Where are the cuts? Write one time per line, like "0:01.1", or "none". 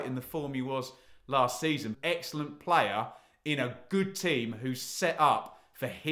0:01.9